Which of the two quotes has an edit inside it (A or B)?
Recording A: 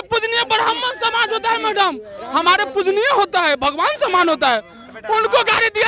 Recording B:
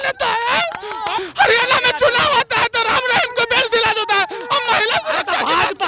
B